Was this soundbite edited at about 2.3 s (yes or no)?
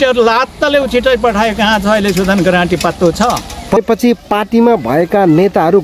no